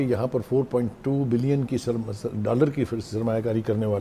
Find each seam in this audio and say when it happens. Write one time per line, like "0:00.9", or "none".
none

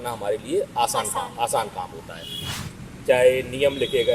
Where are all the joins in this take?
0:02.5

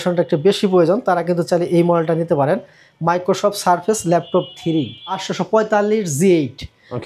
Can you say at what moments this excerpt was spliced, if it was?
0:05.3

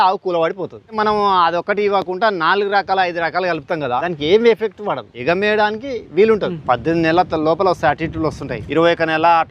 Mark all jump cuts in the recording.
0:01.0
0:04.0
0:05.1
0:06.6
0:08.5

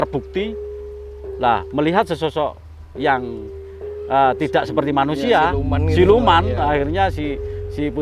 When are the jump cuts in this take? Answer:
none

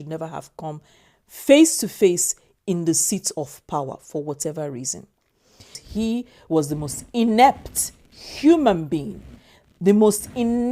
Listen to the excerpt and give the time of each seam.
0:05.8

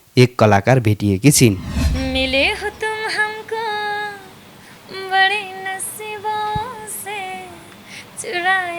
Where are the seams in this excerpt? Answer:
0:01.7

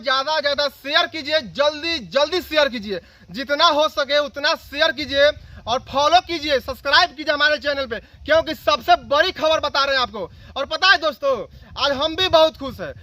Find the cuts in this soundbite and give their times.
none

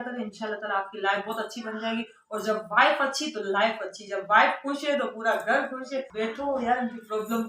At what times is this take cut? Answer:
0:06.1

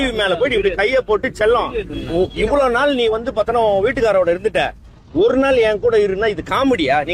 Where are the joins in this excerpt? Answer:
none

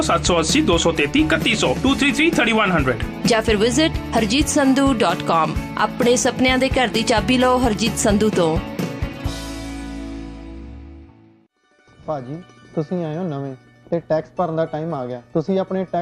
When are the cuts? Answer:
0:11.4

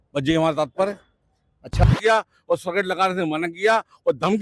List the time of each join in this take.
0:01.8

